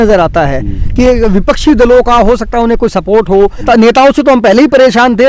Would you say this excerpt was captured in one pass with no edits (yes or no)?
no